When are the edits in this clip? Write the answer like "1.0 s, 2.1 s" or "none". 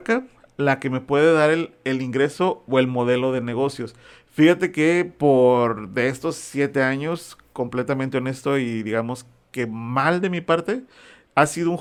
none